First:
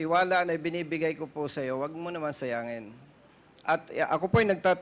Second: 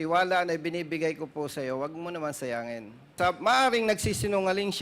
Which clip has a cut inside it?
second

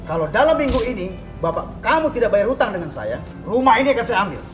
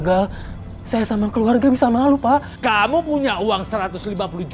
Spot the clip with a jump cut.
first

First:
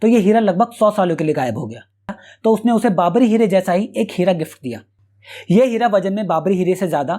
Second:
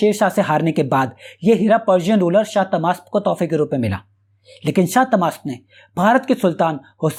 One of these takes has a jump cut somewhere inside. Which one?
first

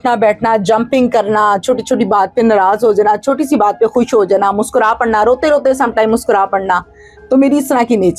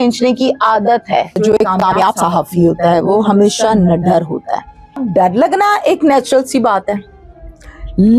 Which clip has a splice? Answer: second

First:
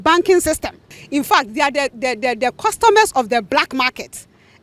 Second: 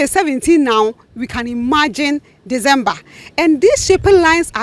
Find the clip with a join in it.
first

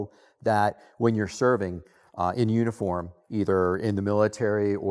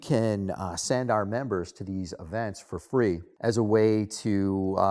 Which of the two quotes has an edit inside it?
second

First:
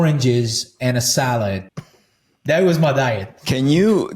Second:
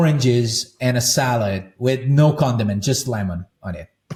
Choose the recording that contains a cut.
first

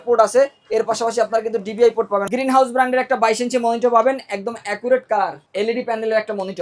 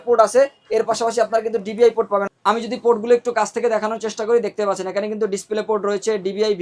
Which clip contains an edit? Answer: first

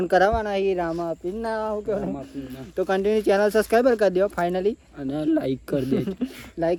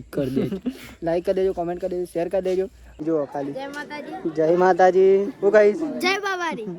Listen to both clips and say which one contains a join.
second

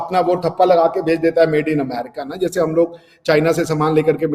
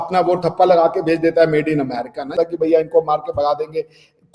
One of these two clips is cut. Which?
second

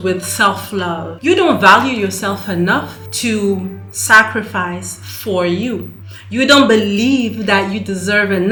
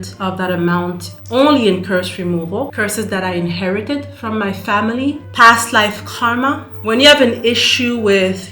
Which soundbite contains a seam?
second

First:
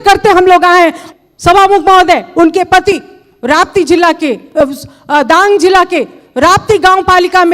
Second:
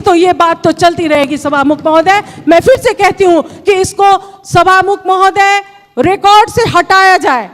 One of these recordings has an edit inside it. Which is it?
first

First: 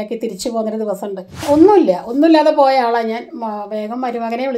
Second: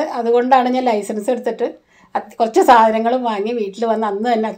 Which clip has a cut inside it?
first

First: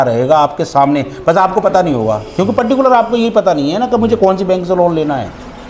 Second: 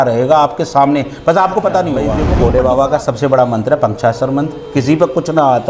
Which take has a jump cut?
second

